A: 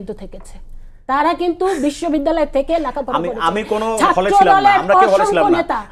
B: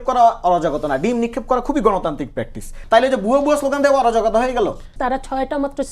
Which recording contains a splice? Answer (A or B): B